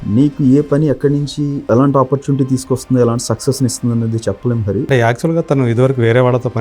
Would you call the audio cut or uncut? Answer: cut